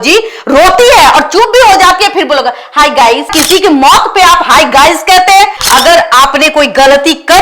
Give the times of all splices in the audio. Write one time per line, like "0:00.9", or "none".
0:03.4
0:05.6